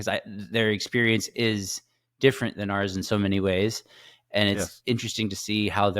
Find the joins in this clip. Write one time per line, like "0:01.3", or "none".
none